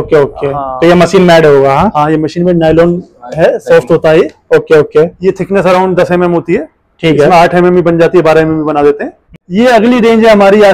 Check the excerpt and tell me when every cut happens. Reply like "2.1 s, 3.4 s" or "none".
9.4 s